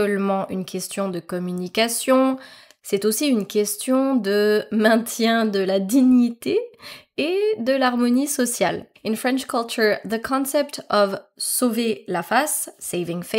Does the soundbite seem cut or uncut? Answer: uncut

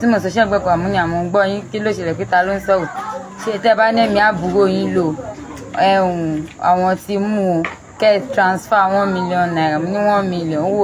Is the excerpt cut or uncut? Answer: uncut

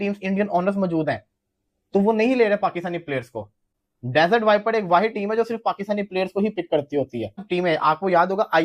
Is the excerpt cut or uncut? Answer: uncut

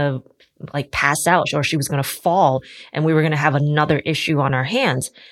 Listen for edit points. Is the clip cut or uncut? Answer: uncut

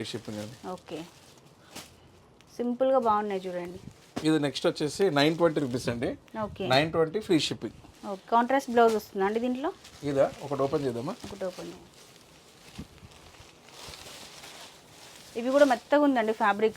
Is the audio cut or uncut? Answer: uncut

